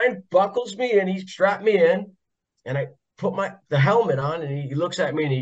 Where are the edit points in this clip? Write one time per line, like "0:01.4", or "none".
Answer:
0:01.2